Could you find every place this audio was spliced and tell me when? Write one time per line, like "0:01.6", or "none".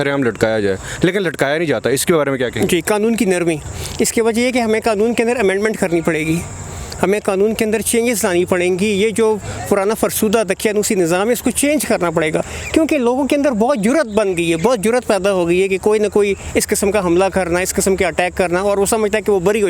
none